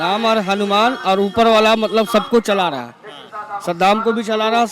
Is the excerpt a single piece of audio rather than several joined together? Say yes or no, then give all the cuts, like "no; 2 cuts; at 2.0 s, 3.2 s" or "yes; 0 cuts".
yes; 0 cuts